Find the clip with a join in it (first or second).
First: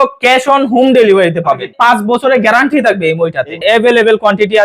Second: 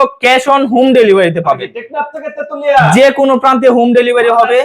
first